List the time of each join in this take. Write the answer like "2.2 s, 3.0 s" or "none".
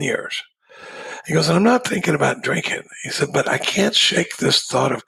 none

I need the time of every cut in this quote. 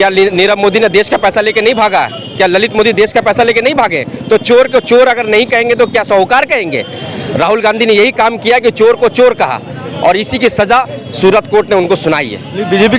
none

